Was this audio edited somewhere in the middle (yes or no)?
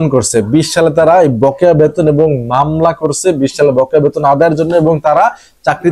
no